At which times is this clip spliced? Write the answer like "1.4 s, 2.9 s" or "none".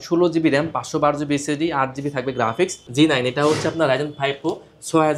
2.8 s